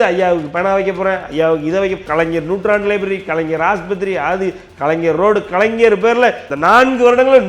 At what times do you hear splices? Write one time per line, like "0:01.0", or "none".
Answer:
0:02.0
0:06.5